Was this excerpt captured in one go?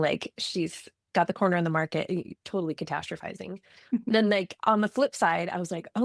yes; 0 cuts

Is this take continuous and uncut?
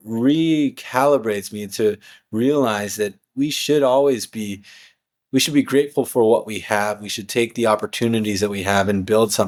yes; 0 cuts

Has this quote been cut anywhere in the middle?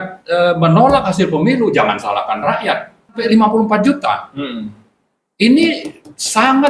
yes; 1 cut; at 3.2 s

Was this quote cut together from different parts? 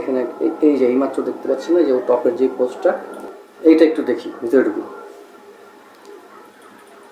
no; 0 cuts

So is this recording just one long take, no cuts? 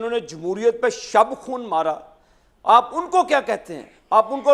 yes; 0 cuts

